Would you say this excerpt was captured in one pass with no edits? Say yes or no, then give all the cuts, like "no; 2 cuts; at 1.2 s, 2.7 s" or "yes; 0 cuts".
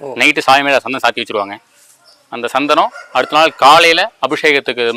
yes; 0 cuts